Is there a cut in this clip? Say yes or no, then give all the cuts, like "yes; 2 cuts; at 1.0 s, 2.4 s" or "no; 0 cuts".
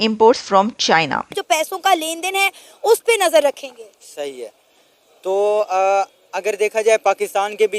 yes; 1 cut; at 1.3 s